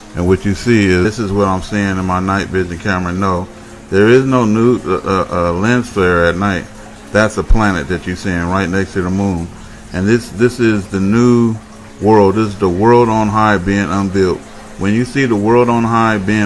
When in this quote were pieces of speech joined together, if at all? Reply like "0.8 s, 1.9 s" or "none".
none